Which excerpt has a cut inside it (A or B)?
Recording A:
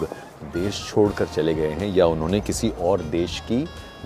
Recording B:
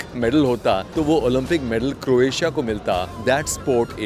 B